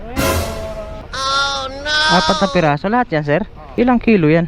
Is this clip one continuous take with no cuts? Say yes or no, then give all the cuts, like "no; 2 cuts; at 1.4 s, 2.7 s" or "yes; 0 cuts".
no; 2 cuts; at 1.0 s, 3.6 s